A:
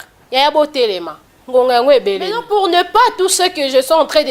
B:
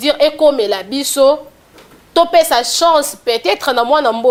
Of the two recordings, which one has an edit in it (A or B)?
A